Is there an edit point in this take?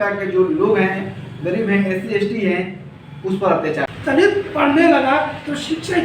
yes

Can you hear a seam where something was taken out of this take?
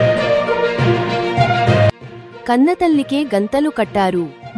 yes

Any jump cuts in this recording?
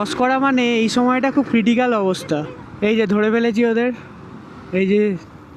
yes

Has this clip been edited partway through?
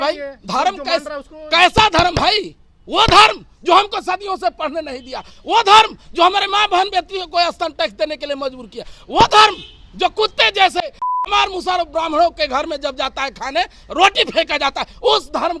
no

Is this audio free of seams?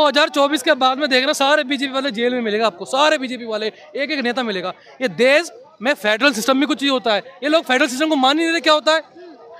yes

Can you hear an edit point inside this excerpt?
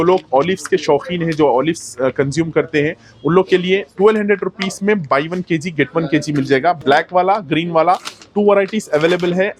no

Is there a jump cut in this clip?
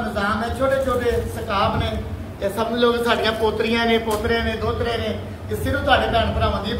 no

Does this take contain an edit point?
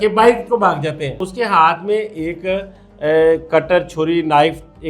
yes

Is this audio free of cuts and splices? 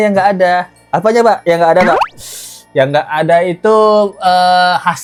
yes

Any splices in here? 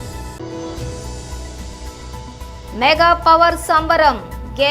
yes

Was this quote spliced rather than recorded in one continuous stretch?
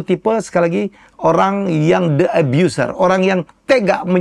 no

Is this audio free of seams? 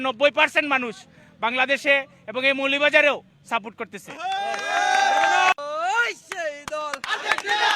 no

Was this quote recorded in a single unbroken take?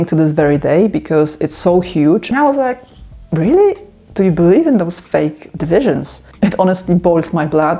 no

